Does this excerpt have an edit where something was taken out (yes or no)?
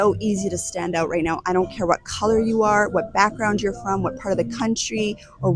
no